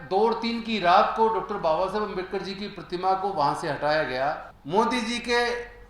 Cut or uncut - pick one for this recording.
cut